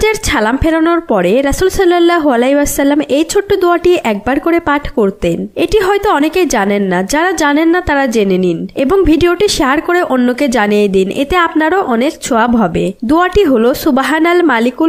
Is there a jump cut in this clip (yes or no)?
no